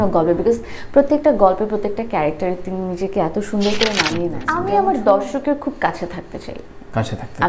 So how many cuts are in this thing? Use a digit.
1